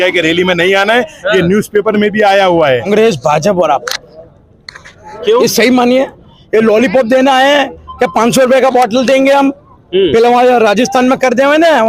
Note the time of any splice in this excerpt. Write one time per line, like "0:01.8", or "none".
0:02.9